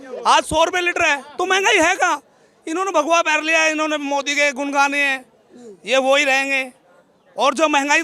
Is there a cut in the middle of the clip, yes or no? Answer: no